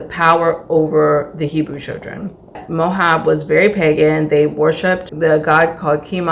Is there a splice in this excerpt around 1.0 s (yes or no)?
no